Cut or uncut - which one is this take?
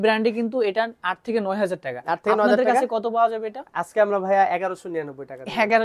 uncut